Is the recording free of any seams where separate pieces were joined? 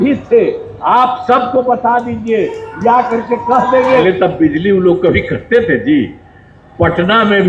no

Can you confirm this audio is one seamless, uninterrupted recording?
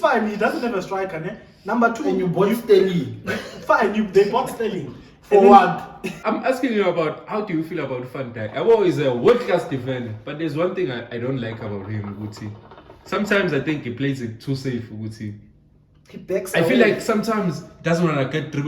no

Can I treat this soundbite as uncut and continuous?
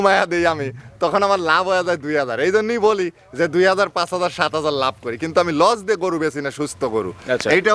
yes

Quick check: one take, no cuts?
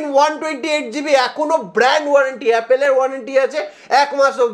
yes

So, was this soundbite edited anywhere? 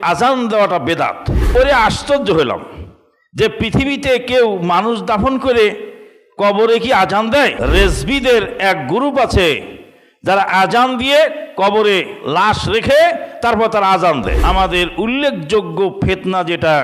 yes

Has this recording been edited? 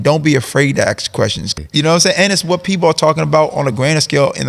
yes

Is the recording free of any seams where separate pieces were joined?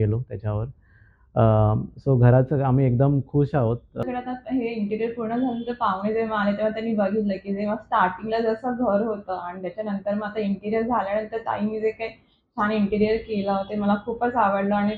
no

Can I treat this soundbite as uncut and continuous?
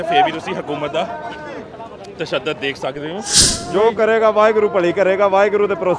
no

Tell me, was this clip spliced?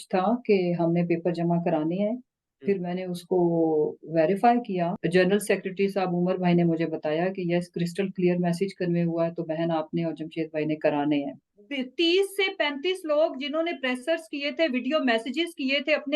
yes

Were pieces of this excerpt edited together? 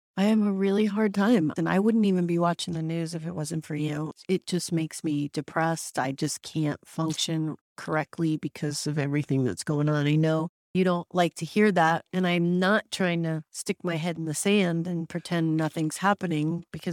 no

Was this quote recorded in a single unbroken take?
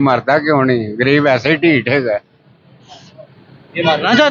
yes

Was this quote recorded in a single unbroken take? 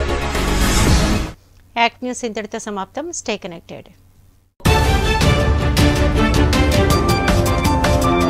yes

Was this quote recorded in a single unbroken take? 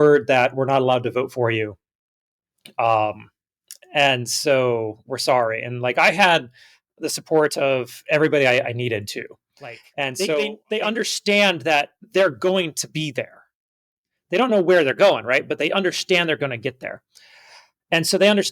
no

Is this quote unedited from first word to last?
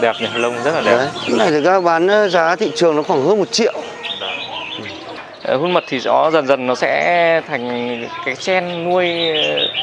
no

